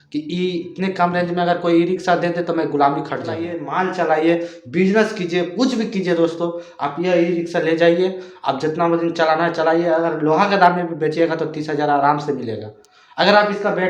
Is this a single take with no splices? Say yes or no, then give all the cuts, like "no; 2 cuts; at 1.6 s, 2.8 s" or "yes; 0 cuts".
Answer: no; 1 cut; at 3.6 s